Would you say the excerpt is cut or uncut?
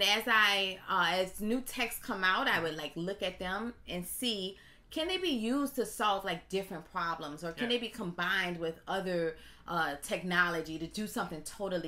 uncut